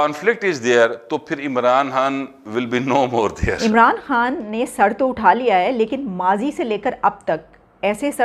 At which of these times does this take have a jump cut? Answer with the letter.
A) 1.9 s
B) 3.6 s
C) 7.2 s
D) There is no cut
B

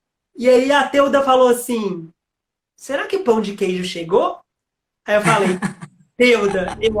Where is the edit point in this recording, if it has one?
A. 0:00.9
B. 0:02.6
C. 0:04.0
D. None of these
D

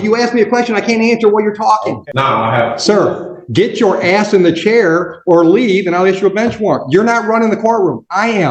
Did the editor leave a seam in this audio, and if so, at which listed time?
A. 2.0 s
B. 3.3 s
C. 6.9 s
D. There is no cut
A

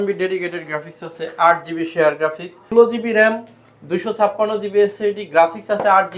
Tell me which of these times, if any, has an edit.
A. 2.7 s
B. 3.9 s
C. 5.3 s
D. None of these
A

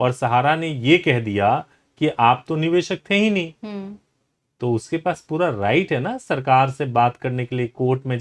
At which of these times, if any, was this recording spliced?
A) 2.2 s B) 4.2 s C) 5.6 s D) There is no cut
D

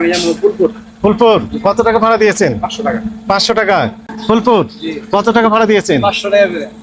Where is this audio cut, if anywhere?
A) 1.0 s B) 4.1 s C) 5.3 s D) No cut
B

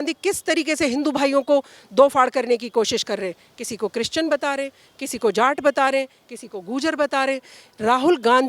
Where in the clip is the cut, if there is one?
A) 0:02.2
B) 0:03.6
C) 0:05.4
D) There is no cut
D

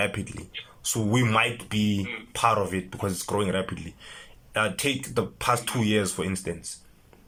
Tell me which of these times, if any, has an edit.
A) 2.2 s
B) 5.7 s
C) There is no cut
C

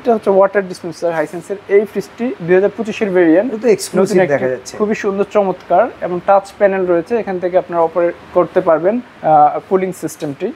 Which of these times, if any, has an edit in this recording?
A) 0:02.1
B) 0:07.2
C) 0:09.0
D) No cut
D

